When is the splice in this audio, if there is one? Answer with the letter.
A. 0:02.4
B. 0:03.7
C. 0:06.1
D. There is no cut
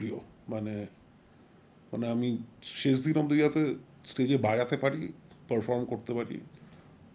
D